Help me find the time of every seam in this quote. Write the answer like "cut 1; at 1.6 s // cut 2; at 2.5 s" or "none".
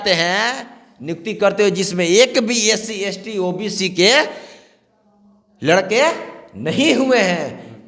none